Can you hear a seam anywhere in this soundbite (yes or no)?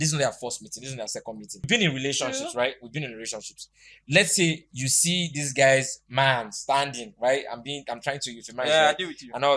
yes